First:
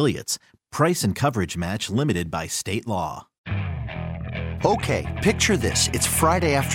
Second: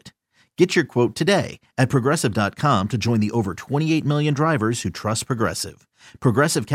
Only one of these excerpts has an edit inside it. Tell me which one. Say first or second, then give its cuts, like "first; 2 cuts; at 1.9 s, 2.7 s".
first; 1 cut; at 3.3 s